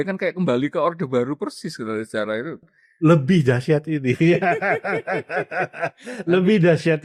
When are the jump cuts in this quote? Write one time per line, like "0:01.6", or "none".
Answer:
none

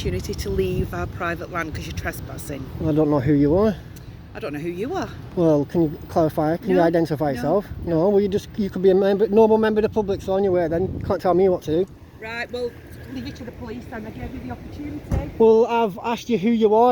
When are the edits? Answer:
none

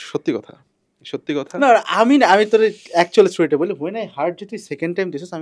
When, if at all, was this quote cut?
none

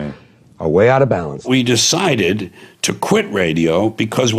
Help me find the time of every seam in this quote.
0:01.5

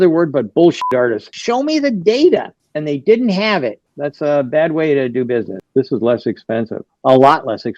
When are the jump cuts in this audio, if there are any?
0:01.3
0:03.9
0:05.6

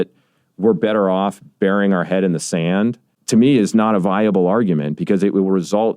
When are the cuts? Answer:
0:03.1

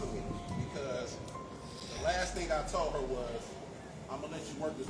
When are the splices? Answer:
none

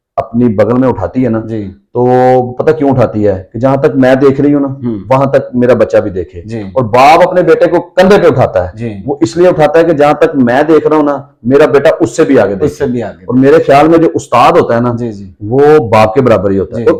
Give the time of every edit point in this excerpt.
none

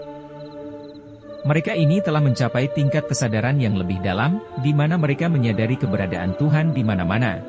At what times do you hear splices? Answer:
0:00.9

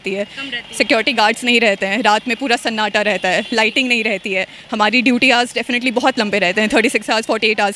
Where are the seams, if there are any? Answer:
none

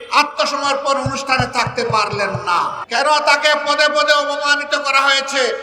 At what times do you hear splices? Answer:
0:02.8

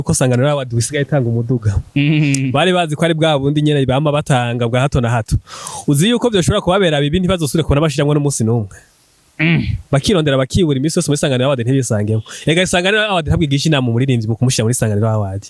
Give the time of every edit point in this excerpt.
none

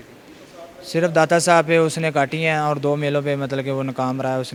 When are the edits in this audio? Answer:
none

